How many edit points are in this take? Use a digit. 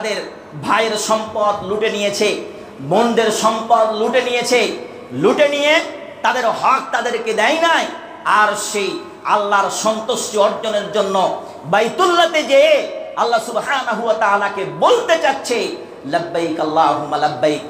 0